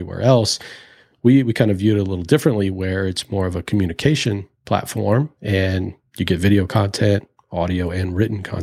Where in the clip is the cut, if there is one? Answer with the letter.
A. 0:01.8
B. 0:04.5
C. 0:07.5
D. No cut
B